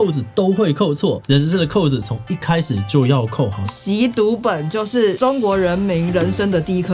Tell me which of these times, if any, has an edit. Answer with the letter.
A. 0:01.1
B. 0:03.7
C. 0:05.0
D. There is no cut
B